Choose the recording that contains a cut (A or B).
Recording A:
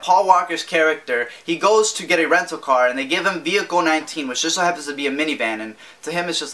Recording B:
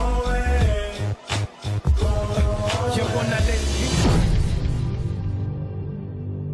B